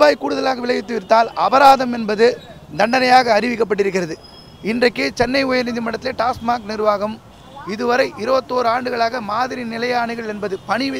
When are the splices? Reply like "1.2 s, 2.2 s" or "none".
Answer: none